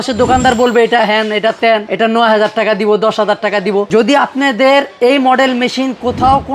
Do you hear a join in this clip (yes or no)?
yes